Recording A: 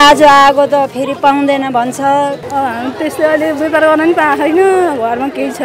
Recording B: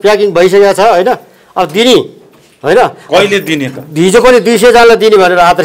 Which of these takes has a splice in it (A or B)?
A